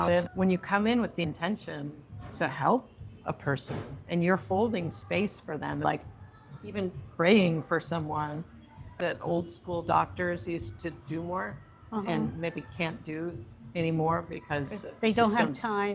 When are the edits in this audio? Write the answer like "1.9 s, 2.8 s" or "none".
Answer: 5.8 s, 9.0 s